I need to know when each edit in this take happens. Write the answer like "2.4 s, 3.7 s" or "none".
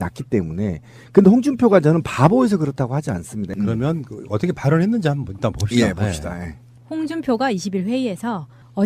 none